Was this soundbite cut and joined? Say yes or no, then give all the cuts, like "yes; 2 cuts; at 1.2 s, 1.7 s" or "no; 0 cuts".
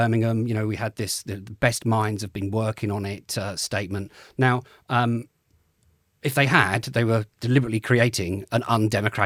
no; 0 cuts